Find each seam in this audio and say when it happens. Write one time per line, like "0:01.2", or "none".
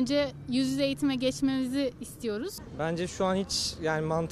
0:02.5